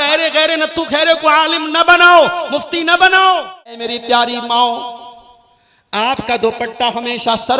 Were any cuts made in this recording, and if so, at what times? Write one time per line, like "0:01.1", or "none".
0:03.9